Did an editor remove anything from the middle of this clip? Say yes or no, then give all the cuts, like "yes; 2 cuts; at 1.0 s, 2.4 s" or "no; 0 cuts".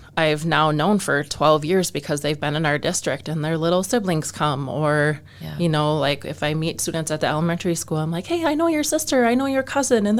no; 0 cuts